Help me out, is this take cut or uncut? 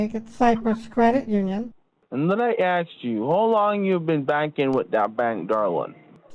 uncut